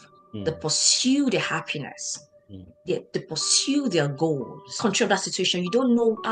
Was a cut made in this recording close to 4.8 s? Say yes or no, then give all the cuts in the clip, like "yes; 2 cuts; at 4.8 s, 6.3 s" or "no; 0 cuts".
yes; 1 cut; at 4.8 s